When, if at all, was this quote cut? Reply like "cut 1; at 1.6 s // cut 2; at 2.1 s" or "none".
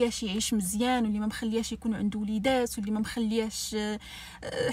none